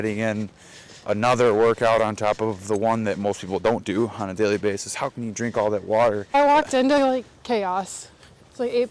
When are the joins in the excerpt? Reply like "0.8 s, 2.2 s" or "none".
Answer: 6.3 s